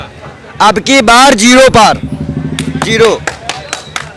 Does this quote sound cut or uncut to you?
uncut